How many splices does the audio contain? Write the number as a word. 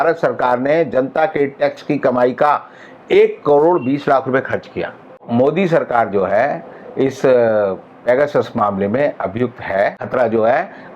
two